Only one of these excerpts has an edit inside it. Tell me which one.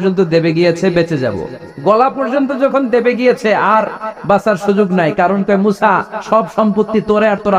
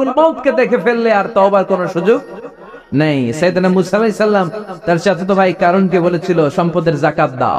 second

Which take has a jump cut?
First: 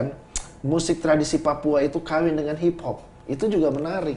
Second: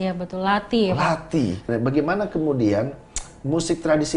second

